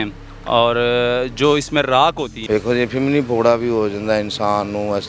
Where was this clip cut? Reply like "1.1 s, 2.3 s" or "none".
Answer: 2.3 s